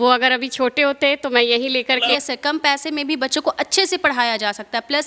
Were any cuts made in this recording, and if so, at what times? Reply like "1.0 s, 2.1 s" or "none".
2.1 s